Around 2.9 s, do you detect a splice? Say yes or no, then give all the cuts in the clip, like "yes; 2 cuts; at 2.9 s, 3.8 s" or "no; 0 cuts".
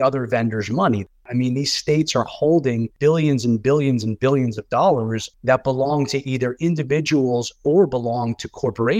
yes; 3 cuts; at 1.2 s, 2.9 s, 5.2 s